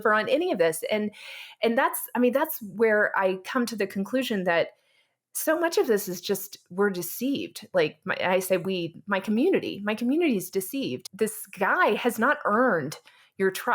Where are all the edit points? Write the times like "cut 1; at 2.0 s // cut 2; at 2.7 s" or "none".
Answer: cut 1; at 11.0 s